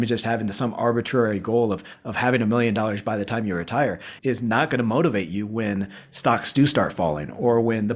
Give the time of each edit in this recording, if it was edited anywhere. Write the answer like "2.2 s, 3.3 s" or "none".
none